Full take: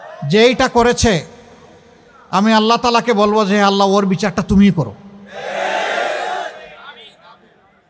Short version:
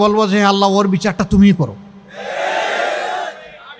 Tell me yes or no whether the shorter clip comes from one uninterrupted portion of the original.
yes